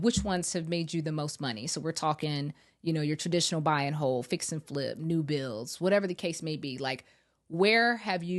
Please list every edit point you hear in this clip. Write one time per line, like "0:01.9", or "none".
none